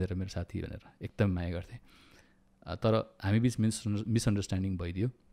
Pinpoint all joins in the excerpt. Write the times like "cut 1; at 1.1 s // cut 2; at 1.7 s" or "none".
none